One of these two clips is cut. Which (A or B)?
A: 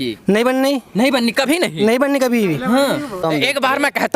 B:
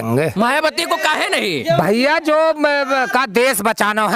A